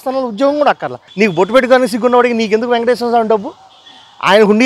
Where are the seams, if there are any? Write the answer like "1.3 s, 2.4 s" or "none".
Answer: 1.0 s

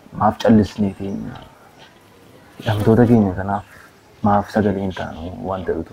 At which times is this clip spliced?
none

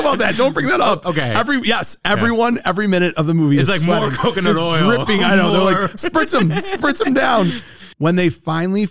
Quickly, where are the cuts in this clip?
7.9 s

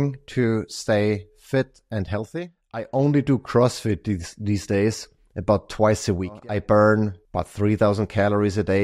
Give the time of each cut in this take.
2.9 s, 6.4 s, 7.2 s

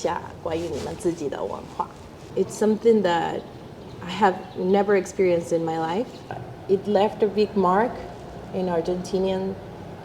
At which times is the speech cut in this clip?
2.2 s, 6.3 s

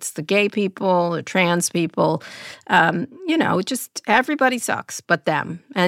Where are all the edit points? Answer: 4.9 s

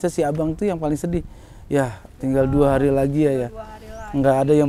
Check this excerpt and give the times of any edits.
none

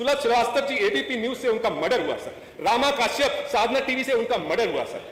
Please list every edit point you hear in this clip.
none

